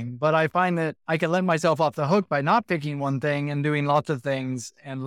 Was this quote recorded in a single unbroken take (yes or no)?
no